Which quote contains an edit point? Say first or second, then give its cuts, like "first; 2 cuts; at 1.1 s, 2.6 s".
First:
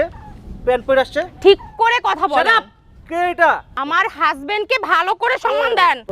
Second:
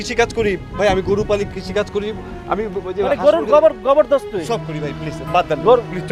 first; 1 cut; at 3.8 s